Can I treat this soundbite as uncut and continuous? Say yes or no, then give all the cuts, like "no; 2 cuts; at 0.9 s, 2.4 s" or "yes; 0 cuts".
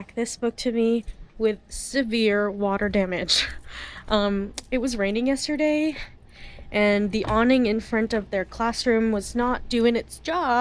yes; 0 cuts